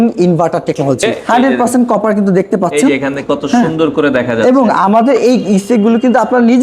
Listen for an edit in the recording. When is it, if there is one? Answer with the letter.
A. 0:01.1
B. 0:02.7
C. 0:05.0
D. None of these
A